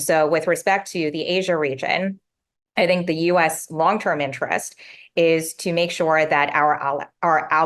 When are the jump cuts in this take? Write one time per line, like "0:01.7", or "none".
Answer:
none